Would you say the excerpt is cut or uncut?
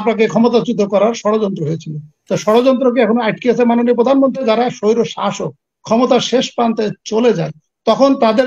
cut